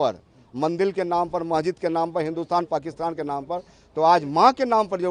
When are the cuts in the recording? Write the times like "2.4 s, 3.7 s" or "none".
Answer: none